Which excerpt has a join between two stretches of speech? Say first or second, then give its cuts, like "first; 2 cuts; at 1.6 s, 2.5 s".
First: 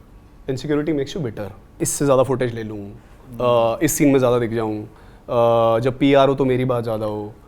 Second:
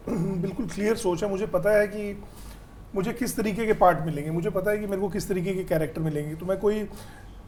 first; 1 cut; at 1.7 s